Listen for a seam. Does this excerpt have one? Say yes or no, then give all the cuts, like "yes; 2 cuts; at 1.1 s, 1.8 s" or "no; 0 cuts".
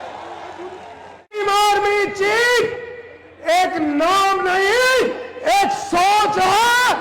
yes; 1 cut; at 1.4 s